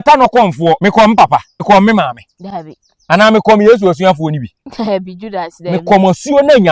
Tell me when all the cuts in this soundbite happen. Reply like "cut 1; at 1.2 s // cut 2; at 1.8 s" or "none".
cut 1; at 0.8 s // cut 2; at 1.6 s